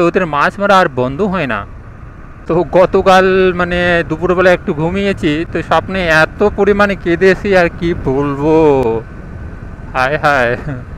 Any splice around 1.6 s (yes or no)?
no